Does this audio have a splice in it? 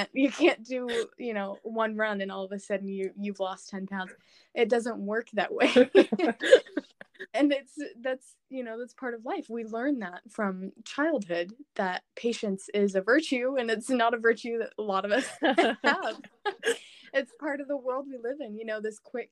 no; 0 cuts

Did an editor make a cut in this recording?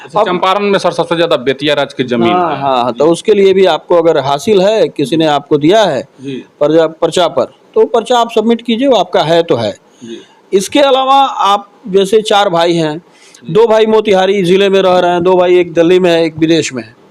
no; 0 cuts

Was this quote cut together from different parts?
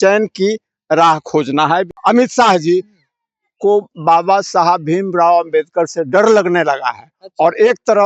yes; 1 cut; at 1.9 s

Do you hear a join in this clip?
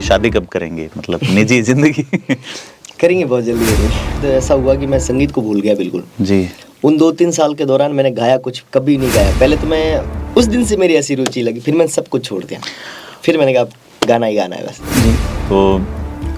yes; 3 cuts; at 4.2 s, 10.1 s, 15.3 s

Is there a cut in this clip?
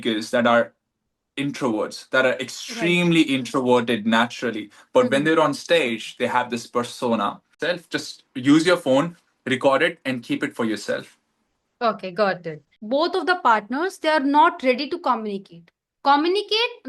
yes; 2 cuts; at 7.6 s, 12.7 s

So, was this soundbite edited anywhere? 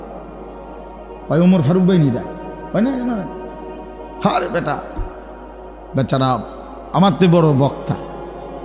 no; 0 cuts

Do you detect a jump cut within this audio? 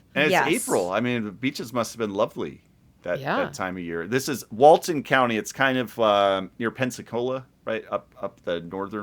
no; 0 cuts

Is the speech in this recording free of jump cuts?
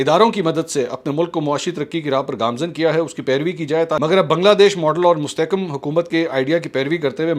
no; 1 cut; at 4.0 s

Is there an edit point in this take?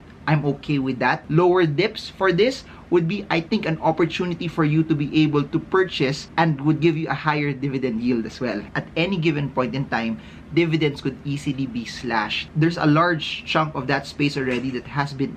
yes; 4 cuts; at 1.2 s, 6.2 s, 8.7 s, 12.4 s

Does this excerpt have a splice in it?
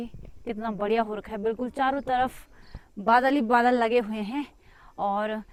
no; 0 cuts

